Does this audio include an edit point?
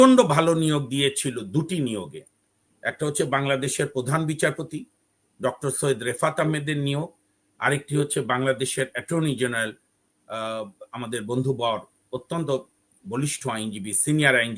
no; 0 cuts

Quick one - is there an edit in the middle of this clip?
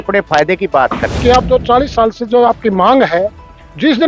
yes; 1 cut; at 1.1 s

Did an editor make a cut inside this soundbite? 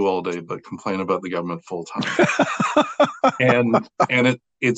no; 0 cuts

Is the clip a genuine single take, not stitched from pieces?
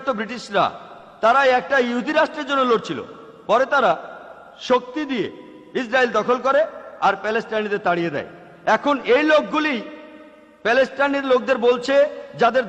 yes; 0 cuts

